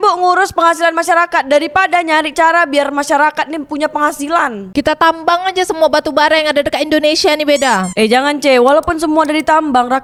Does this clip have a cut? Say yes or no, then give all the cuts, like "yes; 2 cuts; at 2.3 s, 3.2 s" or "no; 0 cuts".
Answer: no; 0 cuts